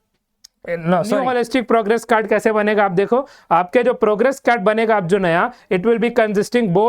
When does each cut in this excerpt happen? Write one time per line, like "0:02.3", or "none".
0:01.2

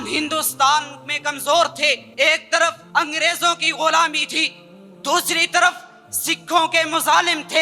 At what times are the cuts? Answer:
0:02.1
0:02.8

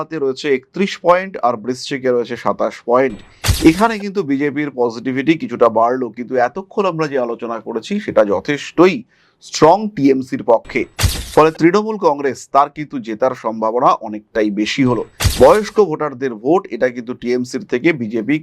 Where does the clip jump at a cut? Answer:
0:15.3

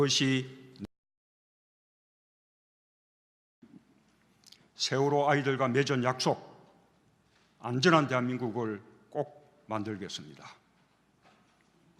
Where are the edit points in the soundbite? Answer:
0:10.1

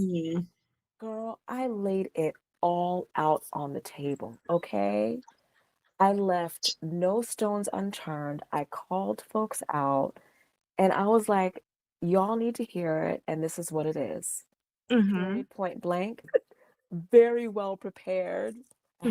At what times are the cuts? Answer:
0:16.2

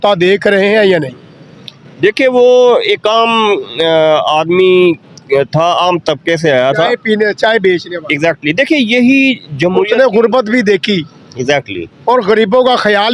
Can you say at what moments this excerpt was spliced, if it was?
none

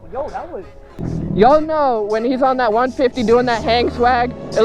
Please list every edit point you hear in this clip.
0:01.0

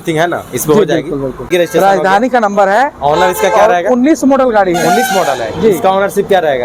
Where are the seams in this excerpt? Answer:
0:01.5

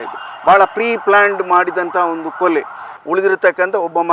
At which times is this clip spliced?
0:02.9

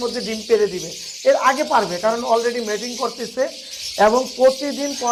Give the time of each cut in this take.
none

